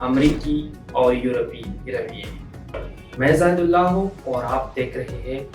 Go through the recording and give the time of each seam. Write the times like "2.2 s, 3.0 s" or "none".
2.9 s